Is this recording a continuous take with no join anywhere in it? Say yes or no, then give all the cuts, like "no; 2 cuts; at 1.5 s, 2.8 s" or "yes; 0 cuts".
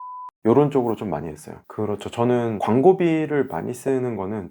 no; 1 cut; at 1.5 s